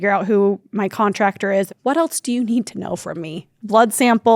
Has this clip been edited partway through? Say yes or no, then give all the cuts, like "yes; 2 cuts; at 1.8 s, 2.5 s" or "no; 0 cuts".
yes; 1 cut; at 1.7 s